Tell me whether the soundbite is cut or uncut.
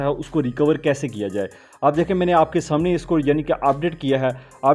uncut